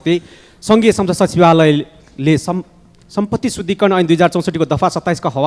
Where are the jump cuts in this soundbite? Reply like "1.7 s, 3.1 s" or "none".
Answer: none